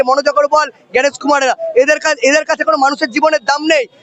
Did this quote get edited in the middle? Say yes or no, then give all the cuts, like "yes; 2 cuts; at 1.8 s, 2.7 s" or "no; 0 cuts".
no; 0 cuts